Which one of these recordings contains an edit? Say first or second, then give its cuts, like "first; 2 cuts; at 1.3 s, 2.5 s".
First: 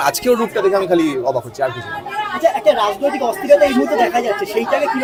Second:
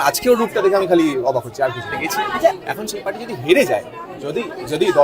second; 1 cut; at 2.5 s